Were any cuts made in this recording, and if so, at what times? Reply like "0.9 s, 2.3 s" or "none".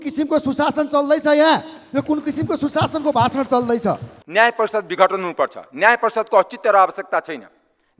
4.1 s

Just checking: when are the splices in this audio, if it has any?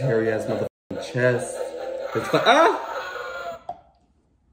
none

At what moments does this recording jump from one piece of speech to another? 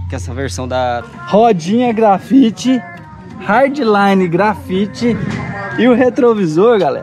1.0 s

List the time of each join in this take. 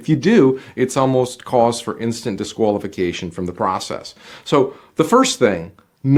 none

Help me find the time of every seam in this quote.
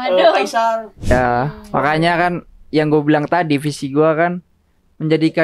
1.1 s

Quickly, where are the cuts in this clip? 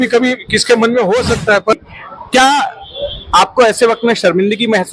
1.7 s

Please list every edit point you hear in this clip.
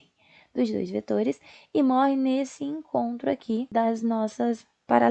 3.7 s

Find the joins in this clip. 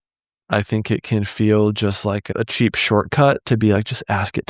2.3 s

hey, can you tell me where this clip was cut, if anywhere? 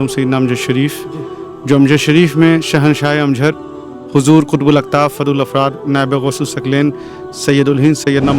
none

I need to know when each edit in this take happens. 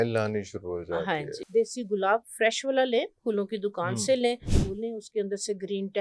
1.4 s, 4.6 s

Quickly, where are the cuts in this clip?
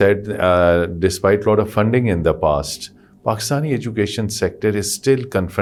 none

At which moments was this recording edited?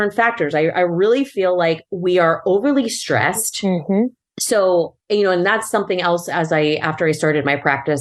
none

